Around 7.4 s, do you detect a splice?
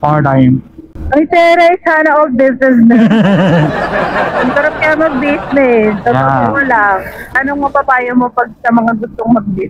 yes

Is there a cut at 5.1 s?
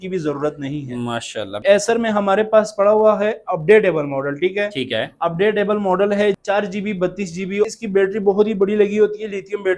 no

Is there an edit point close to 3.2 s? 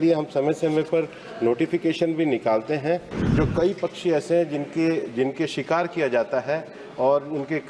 yes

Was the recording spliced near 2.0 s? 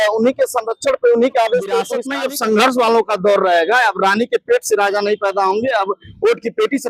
yes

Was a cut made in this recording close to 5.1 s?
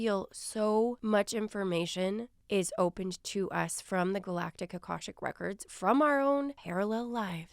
no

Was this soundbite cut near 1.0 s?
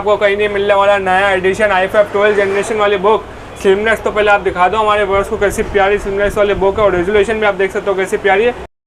no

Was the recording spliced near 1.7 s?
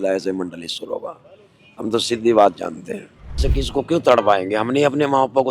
no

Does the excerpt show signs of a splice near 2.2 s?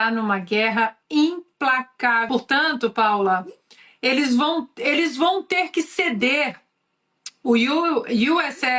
yes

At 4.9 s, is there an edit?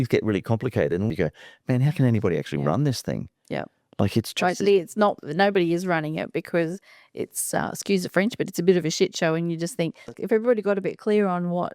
no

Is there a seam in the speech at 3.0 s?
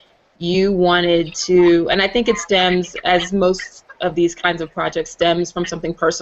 no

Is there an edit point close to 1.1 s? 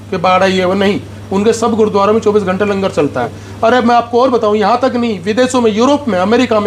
no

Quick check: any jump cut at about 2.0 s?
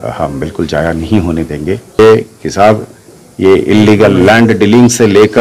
yes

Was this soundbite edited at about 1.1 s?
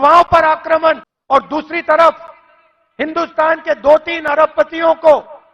yes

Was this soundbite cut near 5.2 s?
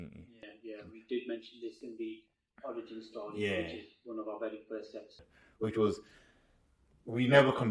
yes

